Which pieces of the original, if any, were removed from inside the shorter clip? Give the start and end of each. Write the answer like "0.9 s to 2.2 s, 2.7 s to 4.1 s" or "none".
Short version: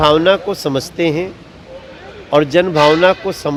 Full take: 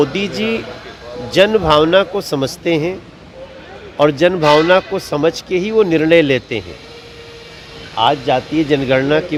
none